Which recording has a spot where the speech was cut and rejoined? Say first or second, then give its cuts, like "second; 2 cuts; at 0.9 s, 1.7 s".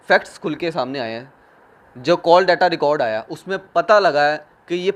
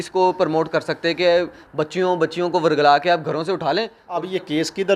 second; 1 cut; at 4.0 s